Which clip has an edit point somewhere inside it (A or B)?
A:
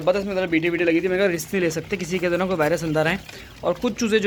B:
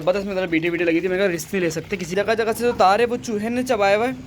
B